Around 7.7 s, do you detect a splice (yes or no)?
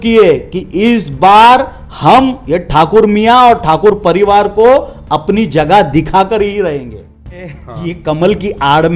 yes